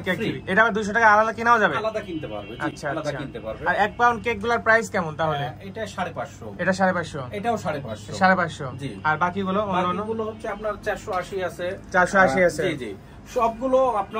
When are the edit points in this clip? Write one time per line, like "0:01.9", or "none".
none